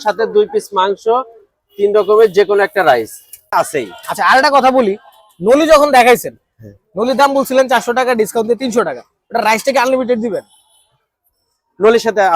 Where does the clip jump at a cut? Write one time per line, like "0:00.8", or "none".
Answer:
0:03.5